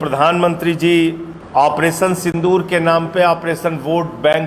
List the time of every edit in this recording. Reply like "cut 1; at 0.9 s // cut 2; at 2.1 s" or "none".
cut 1; at 1.3 s